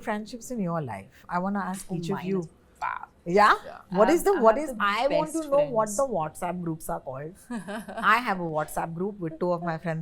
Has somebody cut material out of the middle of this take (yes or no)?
no